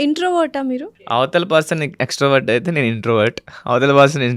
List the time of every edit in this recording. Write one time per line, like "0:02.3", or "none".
0:00.9